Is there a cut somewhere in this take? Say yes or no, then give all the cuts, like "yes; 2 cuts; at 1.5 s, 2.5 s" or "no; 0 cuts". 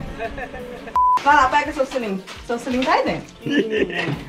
yes; 2 cuts; at 0.9 s, 3.3 s